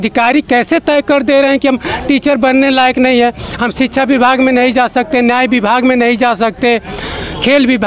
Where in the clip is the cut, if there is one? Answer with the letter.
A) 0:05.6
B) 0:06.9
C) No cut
C